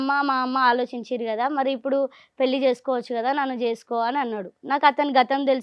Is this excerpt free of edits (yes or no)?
yes